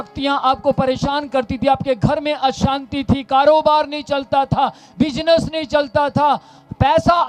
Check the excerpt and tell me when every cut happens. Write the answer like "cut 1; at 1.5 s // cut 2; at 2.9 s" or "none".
none